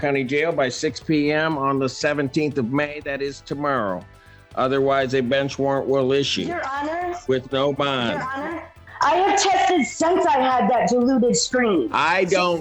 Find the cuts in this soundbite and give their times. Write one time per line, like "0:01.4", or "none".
0:08.8